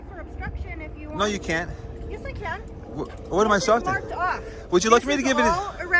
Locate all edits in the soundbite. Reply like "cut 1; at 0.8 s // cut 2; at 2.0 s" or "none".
none